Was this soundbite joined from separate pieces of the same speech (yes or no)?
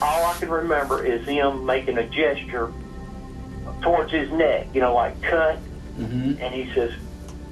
no